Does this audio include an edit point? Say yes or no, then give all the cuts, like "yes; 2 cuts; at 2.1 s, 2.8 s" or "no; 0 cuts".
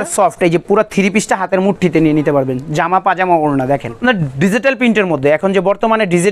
yes; 1 cut; at 4.0 s